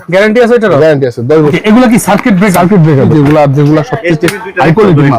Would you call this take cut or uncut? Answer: cut